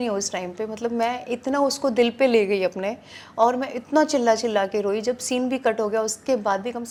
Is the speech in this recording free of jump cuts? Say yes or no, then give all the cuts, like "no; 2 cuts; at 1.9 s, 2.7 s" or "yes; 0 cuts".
yes; 0 cuts